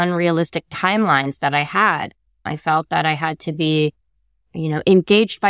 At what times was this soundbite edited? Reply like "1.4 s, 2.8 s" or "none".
2.4 s